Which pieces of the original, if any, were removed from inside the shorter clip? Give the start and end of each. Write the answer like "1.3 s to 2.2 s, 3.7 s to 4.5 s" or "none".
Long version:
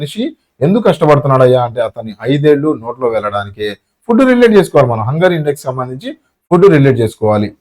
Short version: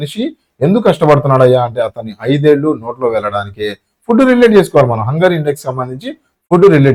none